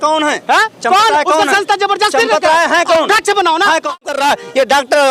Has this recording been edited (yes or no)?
yes